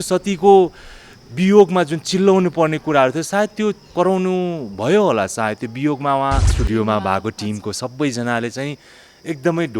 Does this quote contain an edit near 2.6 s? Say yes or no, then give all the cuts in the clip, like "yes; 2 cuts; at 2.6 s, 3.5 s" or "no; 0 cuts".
no; 2 cuts; at 3.9 s, 6.5 s